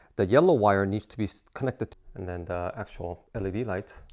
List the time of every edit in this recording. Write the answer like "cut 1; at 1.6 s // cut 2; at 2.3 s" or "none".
cut 1; at 1.9 s // cut 2; at 3.2 s